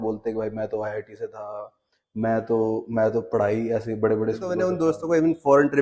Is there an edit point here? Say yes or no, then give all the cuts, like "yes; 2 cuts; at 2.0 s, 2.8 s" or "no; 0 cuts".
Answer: yes; 1 cut; at 4.7 s